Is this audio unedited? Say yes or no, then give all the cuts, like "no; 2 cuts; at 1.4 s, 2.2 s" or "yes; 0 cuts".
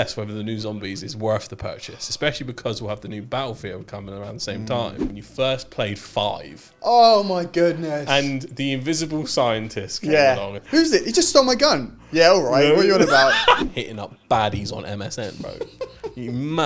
no; 3 cuts; at 5.1 s, 10.6 s, 13.6 s